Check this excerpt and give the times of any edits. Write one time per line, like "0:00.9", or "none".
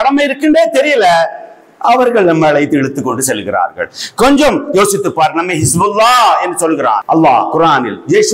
0:07.0

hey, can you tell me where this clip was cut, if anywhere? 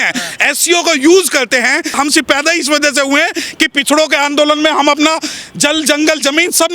0:01.9

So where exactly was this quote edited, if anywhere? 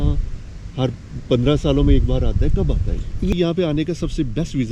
0:03.3

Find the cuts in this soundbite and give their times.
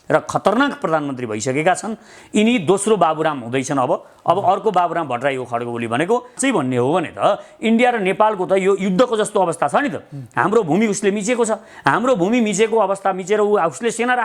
0:06.4

